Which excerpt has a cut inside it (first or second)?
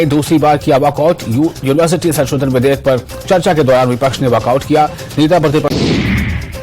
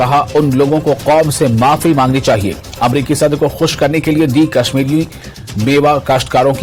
first